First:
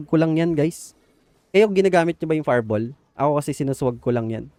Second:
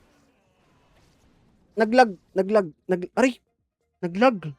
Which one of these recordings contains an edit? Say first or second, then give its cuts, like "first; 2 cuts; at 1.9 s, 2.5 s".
second; 1 cut; at 1.2 s